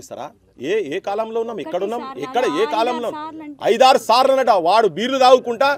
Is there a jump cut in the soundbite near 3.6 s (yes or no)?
no